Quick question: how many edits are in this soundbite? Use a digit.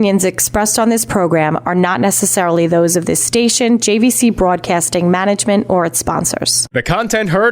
1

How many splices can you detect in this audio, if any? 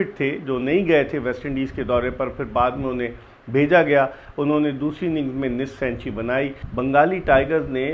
1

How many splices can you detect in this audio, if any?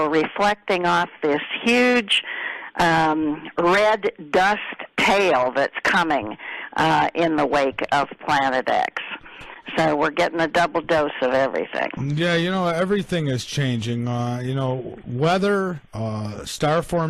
1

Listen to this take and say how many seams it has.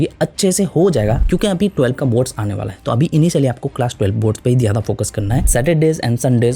2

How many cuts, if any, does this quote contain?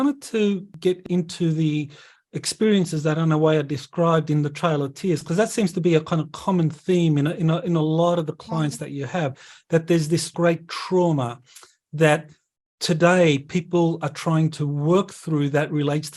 2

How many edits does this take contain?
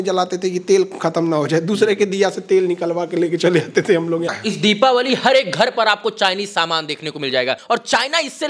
2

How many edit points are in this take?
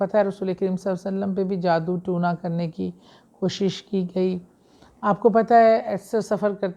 0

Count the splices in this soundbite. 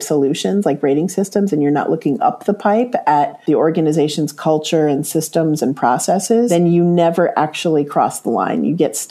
1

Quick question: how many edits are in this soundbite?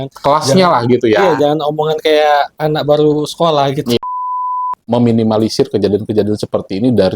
1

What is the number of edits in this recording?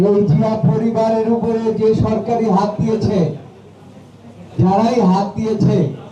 0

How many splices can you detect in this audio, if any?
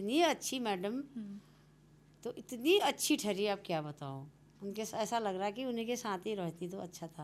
0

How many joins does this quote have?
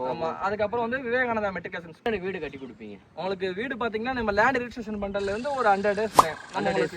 1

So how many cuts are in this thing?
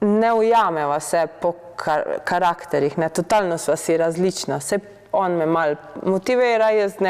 0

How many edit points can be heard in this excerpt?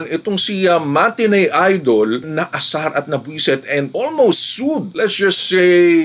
0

